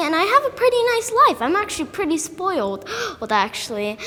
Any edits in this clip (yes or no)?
no